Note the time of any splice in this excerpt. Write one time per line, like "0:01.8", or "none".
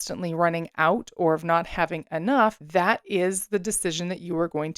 0:02.6